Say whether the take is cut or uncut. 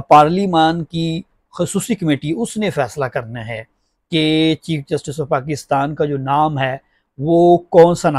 uncut